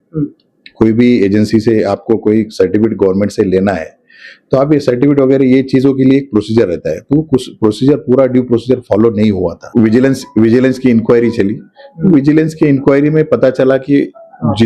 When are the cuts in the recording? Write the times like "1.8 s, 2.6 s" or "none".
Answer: 9.6 s